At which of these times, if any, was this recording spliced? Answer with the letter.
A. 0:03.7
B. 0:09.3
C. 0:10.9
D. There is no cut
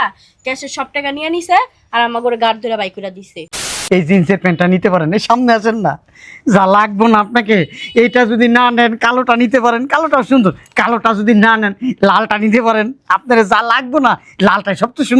A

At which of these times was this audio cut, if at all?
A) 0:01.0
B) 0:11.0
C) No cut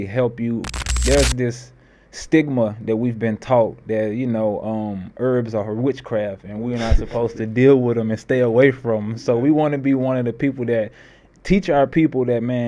A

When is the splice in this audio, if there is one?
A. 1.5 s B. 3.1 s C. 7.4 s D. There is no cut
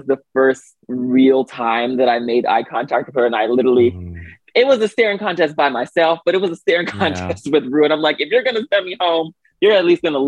D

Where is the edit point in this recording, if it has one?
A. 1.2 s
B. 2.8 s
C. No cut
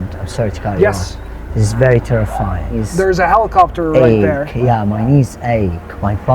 B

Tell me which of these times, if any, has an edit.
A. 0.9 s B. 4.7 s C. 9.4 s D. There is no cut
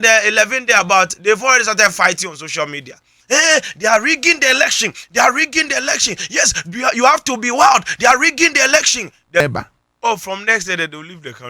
C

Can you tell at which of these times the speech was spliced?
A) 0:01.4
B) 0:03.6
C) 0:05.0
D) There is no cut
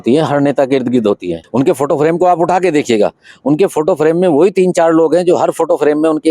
A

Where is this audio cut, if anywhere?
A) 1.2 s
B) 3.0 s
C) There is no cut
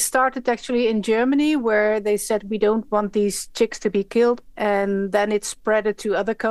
C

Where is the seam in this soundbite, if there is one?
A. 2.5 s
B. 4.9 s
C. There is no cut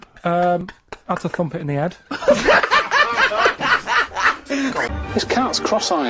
B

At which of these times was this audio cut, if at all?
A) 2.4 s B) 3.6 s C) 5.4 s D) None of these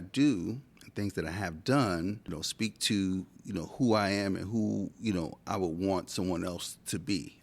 A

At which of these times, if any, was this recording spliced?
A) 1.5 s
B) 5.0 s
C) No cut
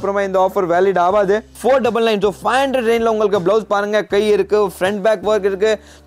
A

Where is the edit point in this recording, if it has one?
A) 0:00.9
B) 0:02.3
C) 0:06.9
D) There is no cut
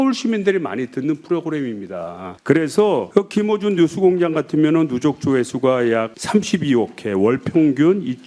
D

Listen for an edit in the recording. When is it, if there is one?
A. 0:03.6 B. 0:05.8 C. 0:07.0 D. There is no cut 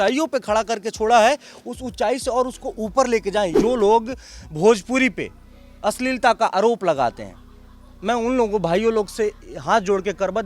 A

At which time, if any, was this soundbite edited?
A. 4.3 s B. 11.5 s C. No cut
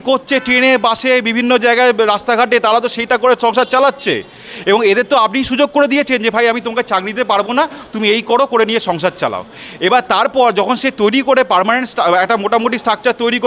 C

